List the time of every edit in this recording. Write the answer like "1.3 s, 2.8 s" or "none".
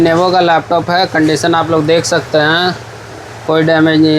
none